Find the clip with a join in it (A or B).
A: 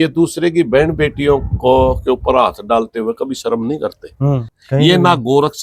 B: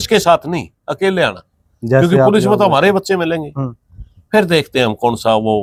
A